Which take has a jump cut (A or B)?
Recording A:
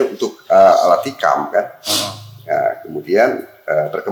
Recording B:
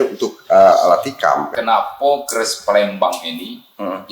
B